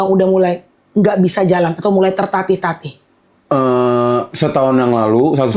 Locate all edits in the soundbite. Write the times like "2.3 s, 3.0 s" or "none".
none